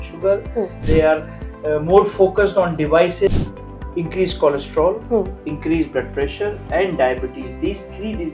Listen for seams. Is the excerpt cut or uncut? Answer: cut